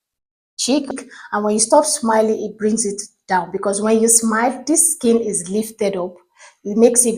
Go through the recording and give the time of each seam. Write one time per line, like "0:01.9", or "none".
0:01.0

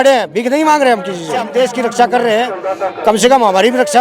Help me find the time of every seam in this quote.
0:01.5

